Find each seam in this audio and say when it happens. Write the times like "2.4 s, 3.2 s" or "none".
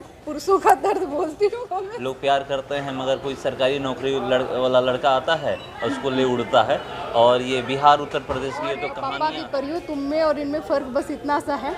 1.9 s, 8.9 s